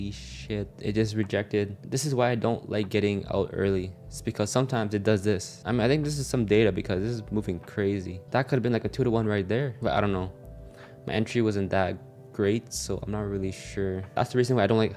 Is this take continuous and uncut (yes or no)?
yes